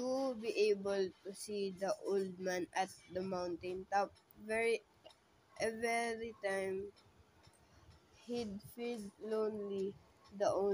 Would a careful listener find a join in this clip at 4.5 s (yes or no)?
no